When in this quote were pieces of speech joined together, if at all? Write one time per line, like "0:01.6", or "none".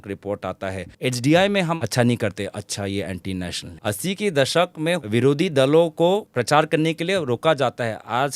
0:00.9
0:01.8
0:03.6
0:05.0
0:06.3